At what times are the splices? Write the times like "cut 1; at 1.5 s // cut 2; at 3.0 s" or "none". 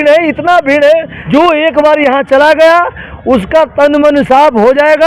cut 1; at 1.1 s